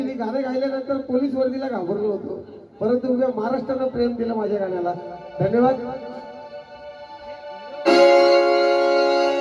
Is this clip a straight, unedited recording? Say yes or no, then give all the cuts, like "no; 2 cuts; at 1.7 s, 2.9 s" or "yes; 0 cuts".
yes; 0 cuts